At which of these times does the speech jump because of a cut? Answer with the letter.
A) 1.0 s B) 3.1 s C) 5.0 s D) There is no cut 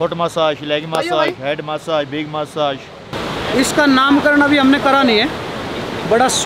B